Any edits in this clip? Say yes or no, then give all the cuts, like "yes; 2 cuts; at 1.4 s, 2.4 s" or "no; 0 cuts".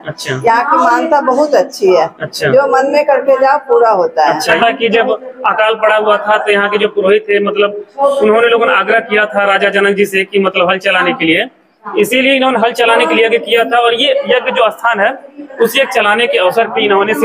yes; 1 cut; at 4.5 s